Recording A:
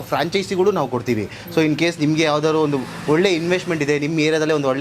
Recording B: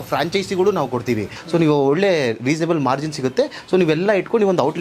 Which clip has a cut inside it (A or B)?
B